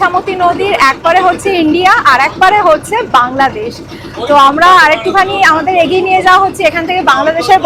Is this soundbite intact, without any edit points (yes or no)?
yes